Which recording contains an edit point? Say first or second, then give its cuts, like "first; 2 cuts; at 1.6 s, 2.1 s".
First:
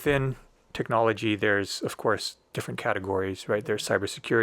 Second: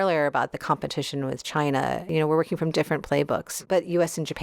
second; 2 cuts; at 2.0 s, 3.5 s